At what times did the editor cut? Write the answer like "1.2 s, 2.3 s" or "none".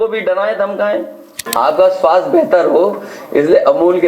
1.4 s

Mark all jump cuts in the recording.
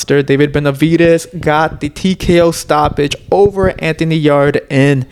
none

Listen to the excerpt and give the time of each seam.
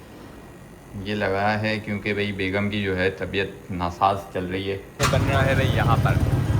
5.0 s

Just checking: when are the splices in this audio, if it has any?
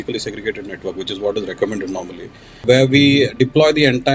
2.6 s

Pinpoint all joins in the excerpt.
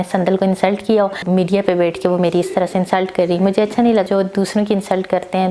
1.2 s, 4.0 s

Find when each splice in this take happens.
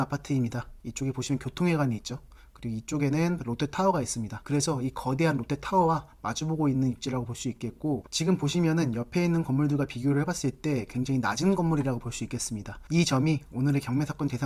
none

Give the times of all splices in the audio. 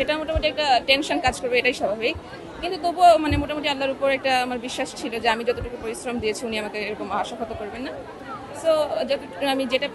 none

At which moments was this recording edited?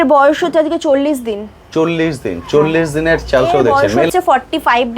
3.9 s

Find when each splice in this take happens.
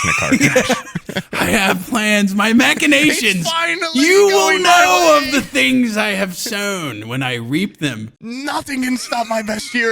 8.3 s

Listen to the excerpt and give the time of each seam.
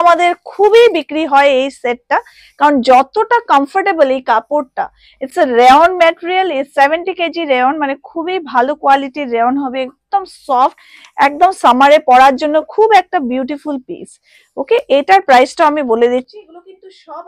none

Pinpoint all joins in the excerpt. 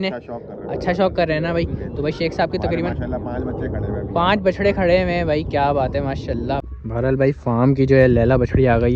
6.6 s

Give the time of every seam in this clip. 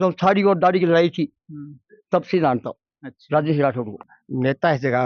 4.0 s

